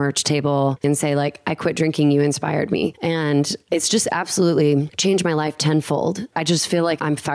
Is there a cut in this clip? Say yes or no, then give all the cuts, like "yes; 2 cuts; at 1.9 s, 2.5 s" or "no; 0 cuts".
yes; 3 cuts; at 0.8 s, 3.6 s, 6.3 s